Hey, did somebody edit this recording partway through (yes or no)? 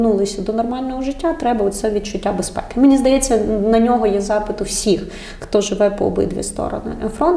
no